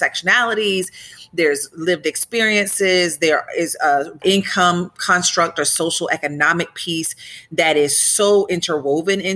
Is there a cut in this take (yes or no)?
yes